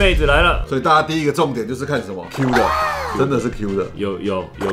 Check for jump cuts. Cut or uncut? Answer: uncut